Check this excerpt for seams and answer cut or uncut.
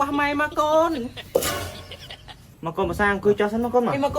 cut